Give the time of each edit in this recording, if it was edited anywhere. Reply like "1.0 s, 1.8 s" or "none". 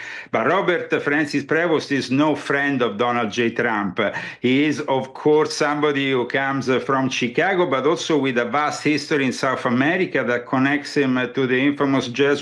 none